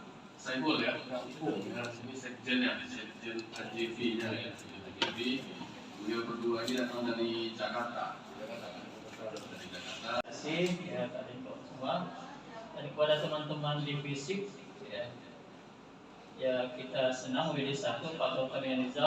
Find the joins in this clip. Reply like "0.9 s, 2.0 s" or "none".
10.3 s